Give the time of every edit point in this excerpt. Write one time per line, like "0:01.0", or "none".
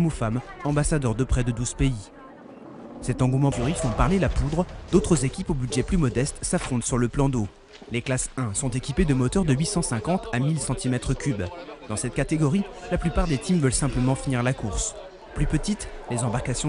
0:03.6